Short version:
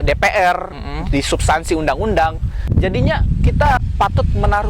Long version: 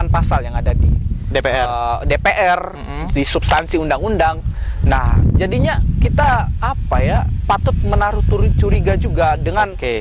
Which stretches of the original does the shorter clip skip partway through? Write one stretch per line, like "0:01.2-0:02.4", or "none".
0:04.7-0:05.2
0:06.4-0:07.3